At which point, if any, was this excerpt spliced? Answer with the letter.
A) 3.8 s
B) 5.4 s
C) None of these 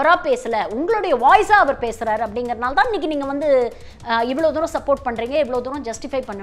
C